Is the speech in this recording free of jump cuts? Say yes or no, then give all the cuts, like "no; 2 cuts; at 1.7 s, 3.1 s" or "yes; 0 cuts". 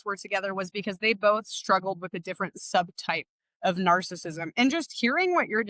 yes; 0 cuts